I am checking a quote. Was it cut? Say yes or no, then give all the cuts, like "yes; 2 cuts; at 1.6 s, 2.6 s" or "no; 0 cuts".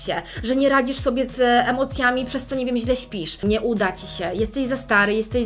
yes; 1 cut; at 3.4 s